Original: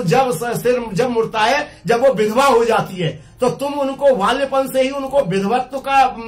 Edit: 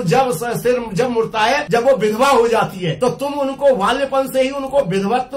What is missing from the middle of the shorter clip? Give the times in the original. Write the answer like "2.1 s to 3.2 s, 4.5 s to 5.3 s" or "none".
1.6 s to 1.8 s, 3.0 s to 3.3 s